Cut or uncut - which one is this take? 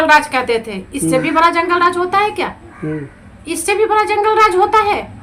uncut